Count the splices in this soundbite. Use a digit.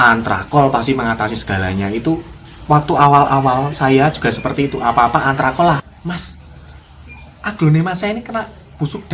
1